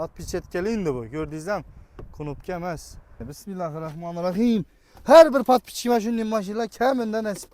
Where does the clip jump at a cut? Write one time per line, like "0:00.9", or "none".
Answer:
0:03.3